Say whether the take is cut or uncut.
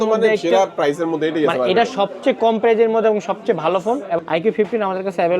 cut